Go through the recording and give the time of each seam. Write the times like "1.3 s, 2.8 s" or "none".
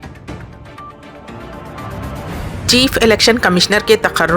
1.1 s